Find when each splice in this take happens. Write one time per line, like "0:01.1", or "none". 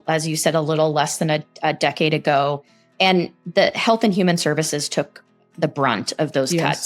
0:02.9